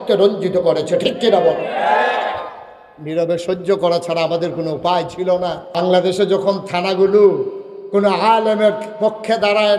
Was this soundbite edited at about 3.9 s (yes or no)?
no